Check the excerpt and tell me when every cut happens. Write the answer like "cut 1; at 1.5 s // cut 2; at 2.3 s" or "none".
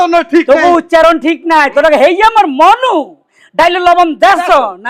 none